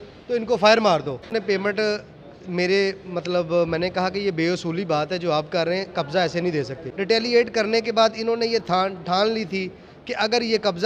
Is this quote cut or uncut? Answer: cut